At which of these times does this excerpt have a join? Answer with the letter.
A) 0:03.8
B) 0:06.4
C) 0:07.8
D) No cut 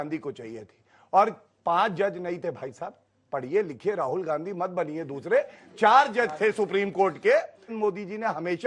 C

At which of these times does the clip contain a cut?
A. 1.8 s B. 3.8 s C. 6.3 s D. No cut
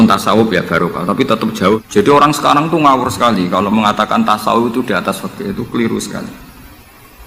A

